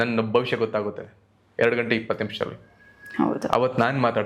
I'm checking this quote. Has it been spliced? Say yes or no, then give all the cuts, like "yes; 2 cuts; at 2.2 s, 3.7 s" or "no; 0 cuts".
no; 0 cuts